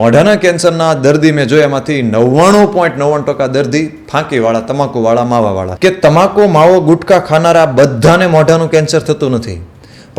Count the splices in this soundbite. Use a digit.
1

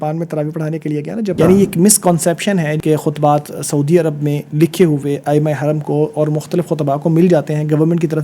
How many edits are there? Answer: 2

